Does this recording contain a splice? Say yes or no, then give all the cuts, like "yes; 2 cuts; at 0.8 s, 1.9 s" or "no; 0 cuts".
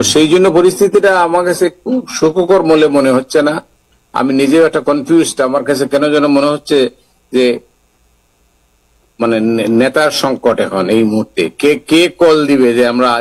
no; 0 cuts